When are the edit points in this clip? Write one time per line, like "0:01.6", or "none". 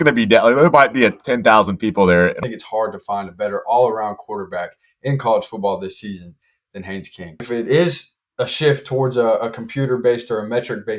0:02.4
0:07.4